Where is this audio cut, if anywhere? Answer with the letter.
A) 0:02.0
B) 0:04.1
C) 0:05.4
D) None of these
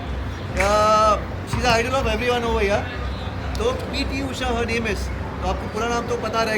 D